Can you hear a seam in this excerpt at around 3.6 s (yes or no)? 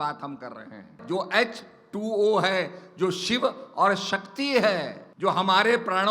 no